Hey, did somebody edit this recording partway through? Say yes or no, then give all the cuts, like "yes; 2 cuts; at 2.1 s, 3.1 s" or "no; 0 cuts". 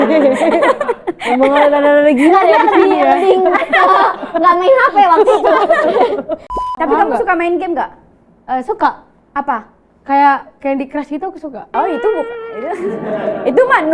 yes; 1 cut; at 6.5 s